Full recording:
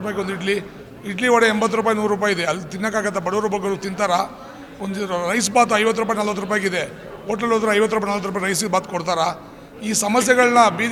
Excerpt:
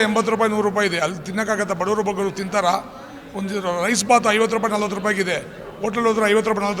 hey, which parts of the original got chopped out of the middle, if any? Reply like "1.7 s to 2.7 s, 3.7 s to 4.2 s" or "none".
none